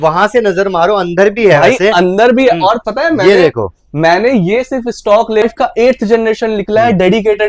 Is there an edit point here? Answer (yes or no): yes